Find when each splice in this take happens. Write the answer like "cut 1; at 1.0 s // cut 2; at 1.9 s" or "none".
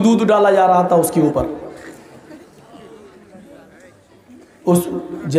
none